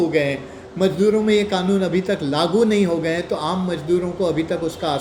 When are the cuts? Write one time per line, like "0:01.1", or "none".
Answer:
none